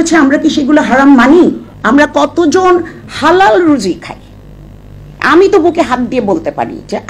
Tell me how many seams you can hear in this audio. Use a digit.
1